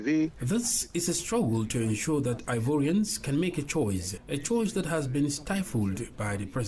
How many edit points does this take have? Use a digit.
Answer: 1